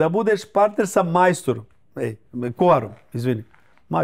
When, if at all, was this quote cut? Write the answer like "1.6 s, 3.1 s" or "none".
none